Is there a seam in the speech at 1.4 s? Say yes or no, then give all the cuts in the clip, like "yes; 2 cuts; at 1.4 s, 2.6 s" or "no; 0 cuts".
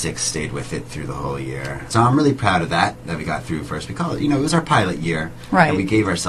no; 1 cut; at 4.3 s